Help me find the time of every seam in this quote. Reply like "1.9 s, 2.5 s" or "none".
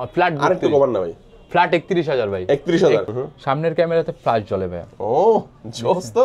3.0 s